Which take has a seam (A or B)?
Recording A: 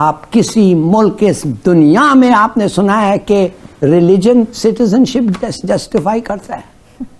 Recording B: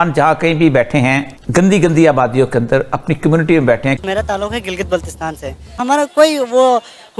B